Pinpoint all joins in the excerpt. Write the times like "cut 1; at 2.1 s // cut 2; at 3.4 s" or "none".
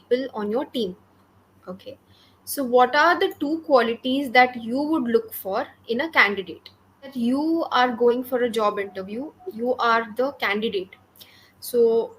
cut 1; at 7.1 s